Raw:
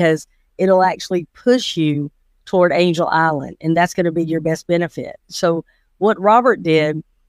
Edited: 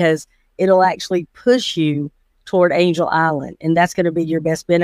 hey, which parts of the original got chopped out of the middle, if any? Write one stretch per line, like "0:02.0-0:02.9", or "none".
none